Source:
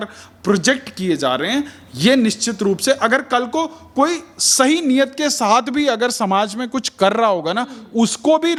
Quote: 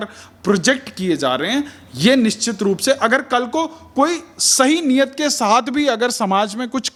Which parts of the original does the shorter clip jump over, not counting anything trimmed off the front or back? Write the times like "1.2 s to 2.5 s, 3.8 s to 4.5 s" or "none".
none